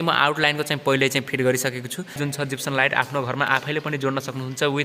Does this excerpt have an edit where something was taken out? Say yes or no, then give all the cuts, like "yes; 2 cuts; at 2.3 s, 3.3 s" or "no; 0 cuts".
yes; 1 cut; at 2.2 s